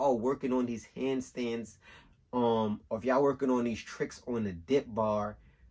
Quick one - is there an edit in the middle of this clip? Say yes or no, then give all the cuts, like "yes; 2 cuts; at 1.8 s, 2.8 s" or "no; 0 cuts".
no; 0 cuts